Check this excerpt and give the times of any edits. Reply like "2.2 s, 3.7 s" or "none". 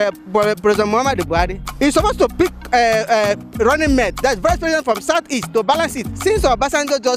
1.6 s, 2.3 s